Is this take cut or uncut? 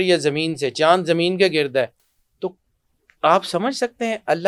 uncut